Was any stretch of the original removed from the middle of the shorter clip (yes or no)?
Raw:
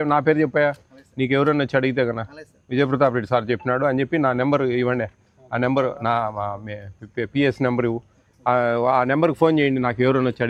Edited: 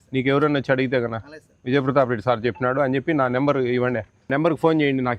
yes